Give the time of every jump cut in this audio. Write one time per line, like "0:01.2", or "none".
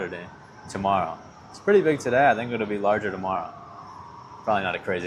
none